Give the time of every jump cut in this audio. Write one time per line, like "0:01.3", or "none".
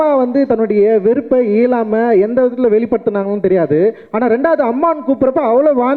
none